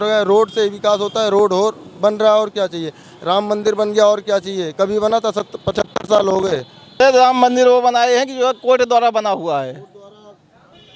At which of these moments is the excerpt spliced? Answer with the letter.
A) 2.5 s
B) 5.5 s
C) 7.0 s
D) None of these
C